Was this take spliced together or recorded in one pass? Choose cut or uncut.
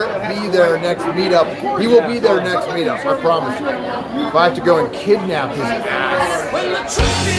cut